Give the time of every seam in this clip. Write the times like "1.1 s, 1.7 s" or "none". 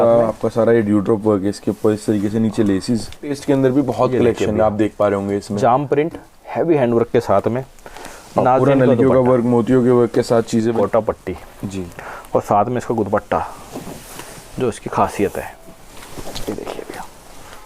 3.4 s, 10.8 s